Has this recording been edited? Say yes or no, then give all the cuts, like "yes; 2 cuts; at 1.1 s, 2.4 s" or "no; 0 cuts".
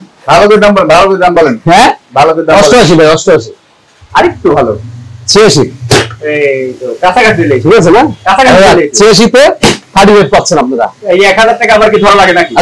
no; 0 cuts